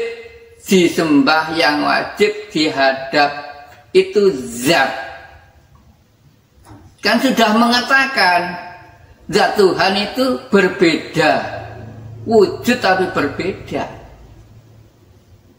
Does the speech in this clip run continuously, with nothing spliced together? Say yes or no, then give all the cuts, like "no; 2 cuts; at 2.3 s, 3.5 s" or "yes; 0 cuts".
yes; 0 cuts